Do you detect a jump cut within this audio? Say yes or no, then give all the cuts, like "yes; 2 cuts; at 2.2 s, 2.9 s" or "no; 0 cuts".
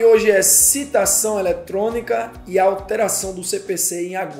no; 0 cuts